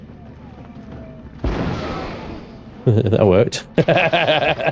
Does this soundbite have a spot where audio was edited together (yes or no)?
no